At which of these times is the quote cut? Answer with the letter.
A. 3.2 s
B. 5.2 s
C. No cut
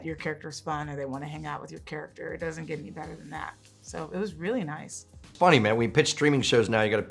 B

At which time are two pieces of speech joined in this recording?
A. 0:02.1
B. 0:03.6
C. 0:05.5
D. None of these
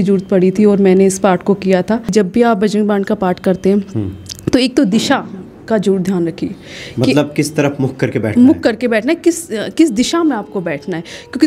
A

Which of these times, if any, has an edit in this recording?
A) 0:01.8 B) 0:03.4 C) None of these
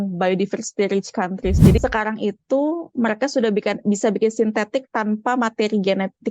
A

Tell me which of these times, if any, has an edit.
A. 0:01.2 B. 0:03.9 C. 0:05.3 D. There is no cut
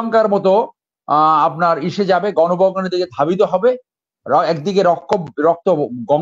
D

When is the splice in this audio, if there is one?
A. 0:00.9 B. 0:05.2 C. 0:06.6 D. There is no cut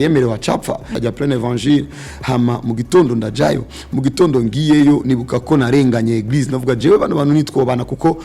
A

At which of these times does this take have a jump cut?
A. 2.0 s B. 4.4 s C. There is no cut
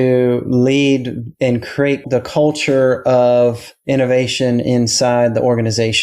A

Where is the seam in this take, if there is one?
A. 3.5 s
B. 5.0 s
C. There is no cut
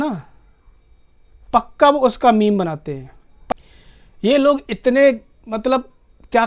A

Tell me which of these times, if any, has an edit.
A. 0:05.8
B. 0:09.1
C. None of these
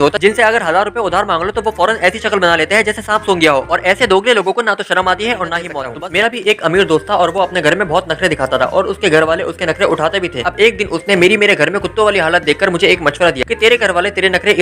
A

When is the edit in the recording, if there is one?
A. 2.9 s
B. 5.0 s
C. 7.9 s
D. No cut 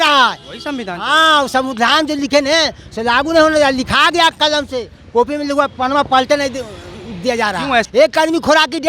C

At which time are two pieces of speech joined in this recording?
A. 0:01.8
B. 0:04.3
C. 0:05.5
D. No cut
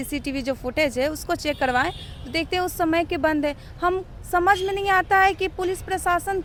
D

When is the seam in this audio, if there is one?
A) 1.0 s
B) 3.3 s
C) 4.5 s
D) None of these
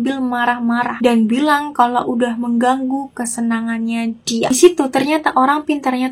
C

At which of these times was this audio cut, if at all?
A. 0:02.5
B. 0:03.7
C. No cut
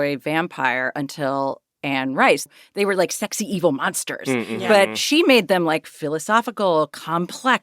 A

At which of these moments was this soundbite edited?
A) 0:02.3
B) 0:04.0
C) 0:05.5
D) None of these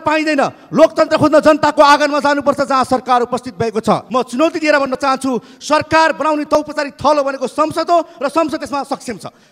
B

